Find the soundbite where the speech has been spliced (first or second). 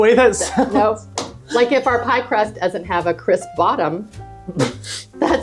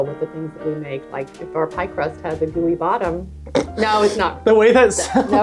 second